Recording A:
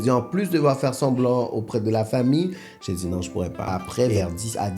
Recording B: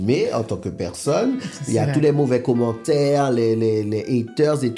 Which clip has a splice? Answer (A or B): A